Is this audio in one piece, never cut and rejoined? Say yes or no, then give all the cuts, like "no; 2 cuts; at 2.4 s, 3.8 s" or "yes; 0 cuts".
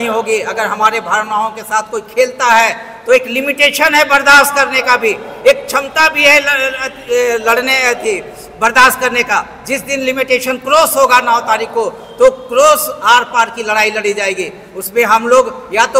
yes; 0 cuts